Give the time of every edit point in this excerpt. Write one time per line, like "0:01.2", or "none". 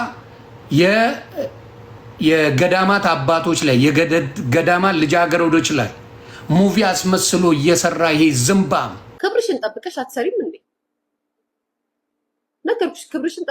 0:09.1